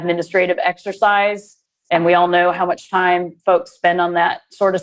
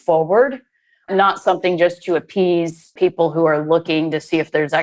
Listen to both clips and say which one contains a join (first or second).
second